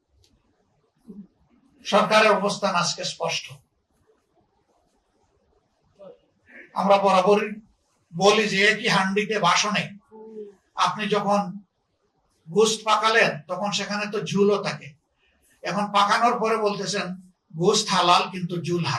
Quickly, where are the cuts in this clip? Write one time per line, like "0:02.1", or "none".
none

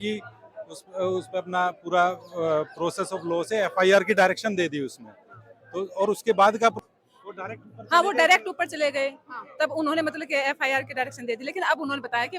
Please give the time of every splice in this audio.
0:06.8

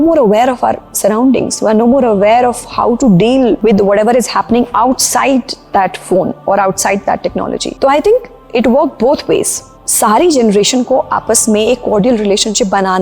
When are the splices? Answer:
none

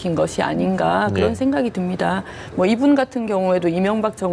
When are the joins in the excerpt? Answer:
none

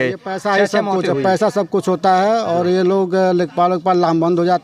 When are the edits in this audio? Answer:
none

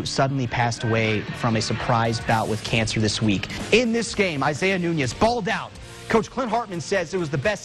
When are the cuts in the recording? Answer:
0:03.5

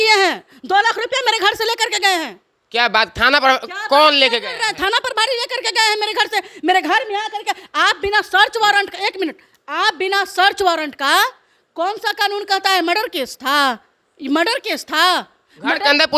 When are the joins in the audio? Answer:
none

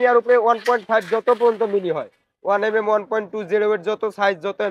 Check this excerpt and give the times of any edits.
none

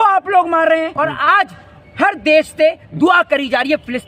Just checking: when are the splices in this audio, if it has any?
0:00.9

